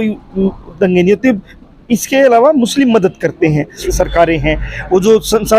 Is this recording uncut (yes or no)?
no